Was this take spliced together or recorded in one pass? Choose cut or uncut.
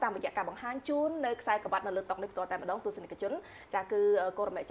uncut